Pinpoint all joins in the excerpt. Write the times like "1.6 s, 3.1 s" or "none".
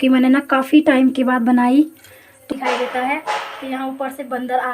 2.4 s